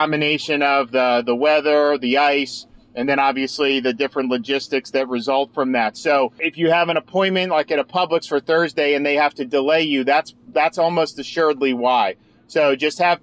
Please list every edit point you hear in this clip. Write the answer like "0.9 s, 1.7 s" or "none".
6.5 s